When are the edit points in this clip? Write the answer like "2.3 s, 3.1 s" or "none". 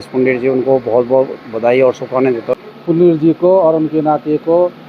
2.6 s